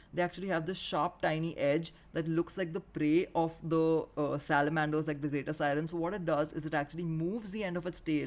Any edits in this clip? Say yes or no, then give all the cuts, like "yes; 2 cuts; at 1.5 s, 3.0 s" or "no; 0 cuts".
no; 0 cuts